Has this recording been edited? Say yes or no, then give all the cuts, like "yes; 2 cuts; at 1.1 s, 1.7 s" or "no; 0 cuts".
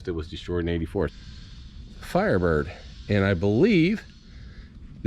yes; 1 cut; at 1.1 s